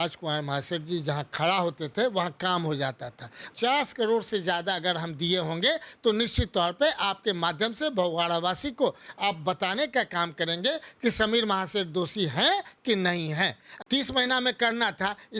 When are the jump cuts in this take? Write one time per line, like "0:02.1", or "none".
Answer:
0:03.5
0:13.7